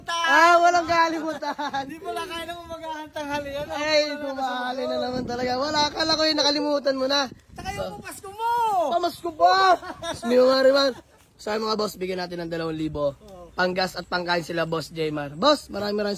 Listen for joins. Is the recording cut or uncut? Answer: uncut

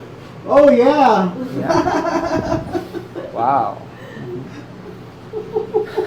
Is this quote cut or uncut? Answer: uncut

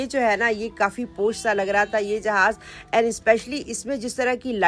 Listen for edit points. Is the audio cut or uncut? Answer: uncut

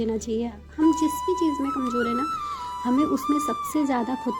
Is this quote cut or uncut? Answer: uncut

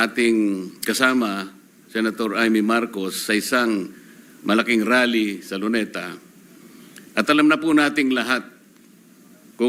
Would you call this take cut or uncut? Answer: uncut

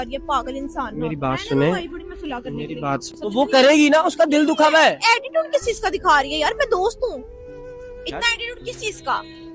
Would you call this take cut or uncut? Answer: cut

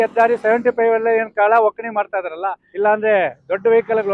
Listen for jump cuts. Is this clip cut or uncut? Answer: cut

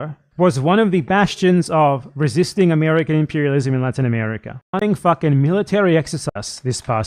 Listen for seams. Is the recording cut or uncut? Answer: cut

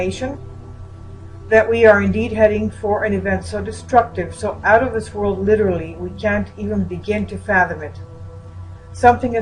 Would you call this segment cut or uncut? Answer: cut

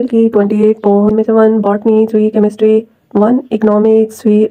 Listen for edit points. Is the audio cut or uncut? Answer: cut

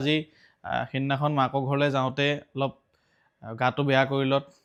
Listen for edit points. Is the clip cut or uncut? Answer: uncut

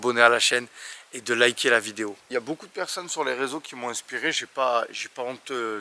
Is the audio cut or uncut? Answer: cut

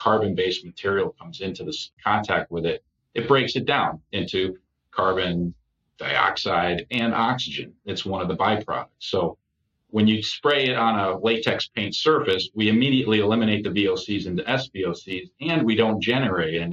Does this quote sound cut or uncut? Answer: cut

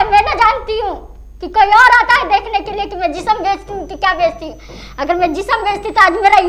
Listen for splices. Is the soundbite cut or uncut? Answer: uncut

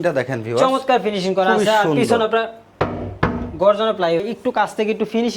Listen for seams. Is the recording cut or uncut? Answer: cut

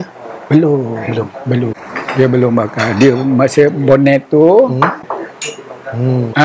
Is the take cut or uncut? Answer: cut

